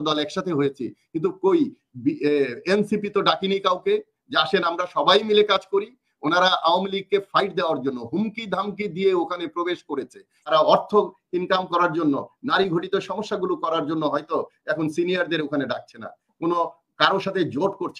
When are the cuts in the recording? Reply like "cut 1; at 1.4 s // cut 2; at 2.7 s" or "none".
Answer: cut 1; at 10.3 s